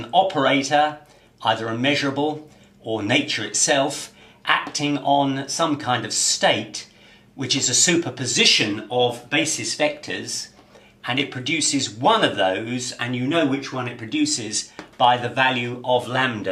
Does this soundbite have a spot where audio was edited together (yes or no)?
no